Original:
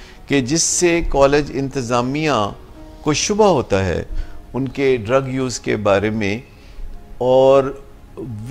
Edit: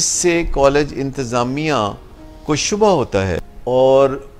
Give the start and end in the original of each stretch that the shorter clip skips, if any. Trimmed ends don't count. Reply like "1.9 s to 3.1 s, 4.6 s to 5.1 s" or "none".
4.1 s to 7.0 s